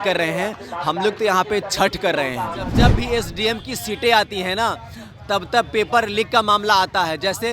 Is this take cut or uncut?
cut